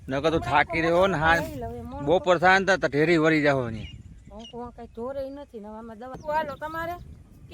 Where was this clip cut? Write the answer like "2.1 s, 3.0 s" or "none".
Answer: 6.2 s